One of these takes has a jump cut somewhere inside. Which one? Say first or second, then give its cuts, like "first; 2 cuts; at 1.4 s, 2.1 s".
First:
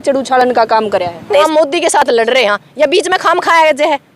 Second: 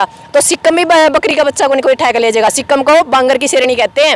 first; 1 cut; at 1.5 s